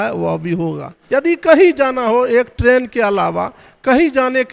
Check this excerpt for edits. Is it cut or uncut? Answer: cut